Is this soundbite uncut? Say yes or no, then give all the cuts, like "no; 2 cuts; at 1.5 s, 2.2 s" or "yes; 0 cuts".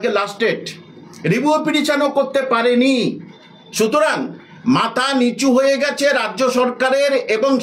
yes; 0 cuts